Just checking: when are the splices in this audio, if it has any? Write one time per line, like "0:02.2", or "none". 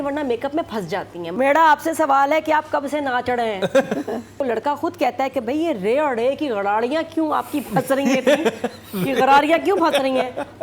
0:01.2
0:04.3